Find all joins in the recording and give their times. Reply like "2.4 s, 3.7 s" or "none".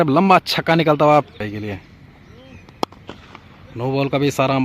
1.3 s